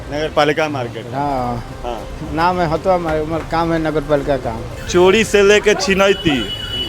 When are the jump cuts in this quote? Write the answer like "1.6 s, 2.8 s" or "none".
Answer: 4.7 s